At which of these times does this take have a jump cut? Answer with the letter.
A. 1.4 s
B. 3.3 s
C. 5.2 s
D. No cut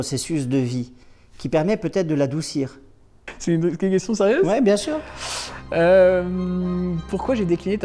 B